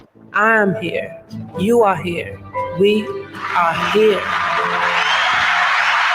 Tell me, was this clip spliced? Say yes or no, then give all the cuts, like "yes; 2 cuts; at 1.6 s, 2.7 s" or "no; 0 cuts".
yes; 1 cut; at 4.6 s